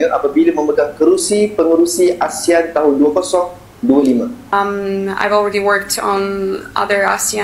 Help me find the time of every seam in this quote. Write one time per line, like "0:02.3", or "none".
0:04.5